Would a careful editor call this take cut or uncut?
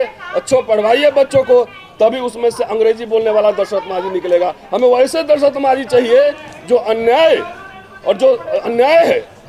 uncut